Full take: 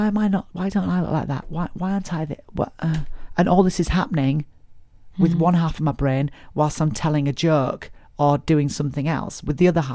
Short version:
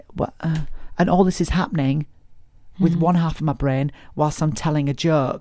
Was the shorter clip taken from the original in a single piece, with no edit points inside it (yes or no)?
yes